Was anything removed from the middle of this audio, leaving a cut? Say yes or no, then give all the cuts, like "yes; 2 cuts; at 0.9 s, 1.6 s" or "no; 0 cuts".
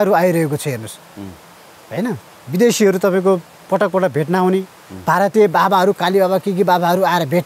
no; 0 cuts